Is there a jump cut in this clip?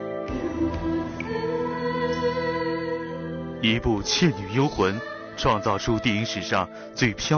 no; 0 cuts

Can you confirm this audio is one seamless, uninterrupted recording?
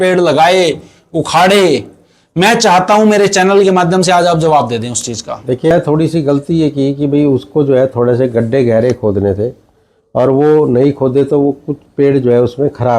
no; 1 cut; at 5.7 s

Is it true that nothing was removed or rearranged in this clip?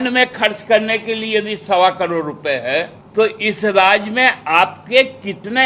no; 1 cut; at 3.0 s

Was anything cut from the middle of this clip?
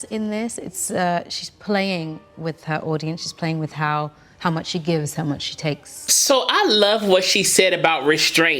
yes; 1 cut; at 6.1 s

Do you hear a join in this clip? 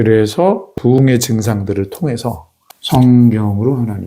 yes; 1 cut; at 1.0 s

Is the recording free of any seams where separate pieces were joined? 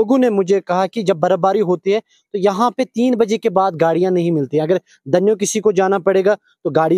yes; 0 cuts

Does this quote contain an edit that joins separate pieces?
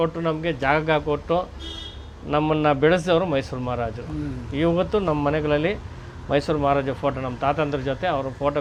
no; 0 cuts

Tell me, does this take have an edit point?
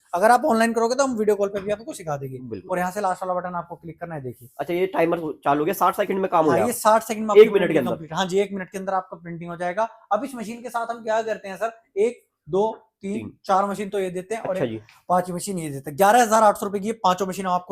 no; 0 cuts

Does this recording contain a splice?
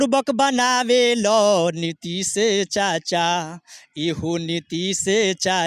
no; 0 cuts

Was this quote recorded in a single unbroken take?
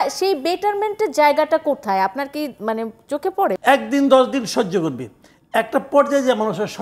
no; 1 cut; at 3.6 s

